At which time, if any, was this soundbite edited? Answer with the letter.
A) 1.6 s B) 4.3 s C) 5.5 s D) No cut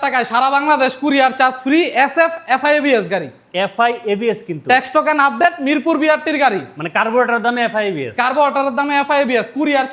D